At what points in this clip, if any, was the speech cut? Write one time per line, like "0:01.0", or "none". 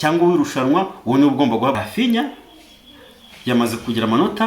0:01.8